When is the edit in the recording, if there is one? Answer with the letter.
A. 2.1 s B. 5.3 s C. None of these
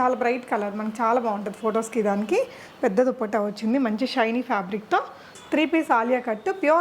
B